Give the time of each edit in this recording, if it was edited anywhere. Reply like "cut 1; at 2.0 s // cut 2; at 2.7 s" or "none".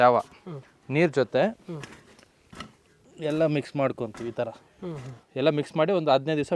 cut 1; at 5.2 s

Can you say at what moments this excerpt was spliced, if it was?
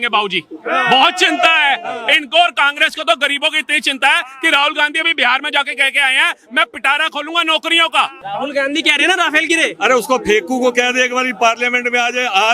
cut 1; at 8.2 s

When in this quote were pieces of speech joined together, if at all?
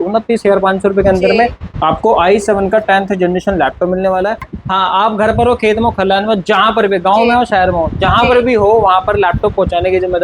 cut 1; at 4.6 s

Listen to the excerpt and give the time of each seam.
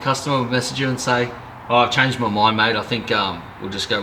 none

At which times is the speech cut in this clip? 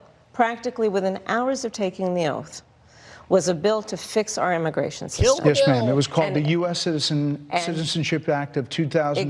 cut 1; at 8.1 s

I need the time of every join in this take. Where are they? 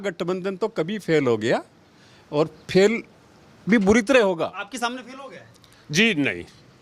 none

